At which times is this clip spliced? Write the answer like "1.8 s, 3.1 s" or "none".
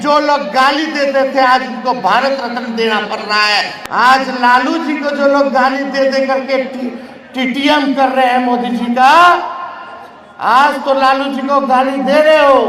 3.7 s